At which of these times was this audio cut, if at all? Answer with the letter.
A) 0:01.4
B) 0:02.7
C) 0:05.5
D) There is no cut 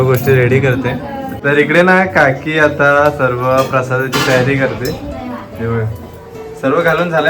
A